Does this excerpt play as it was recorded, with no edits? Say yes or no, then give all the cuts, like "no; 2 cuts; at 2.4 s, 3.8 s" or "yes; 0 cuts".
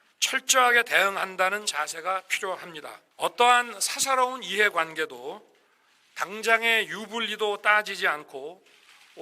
no; 1 cut; at 3.0 s